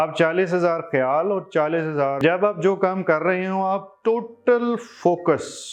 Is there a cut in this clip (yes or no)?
yes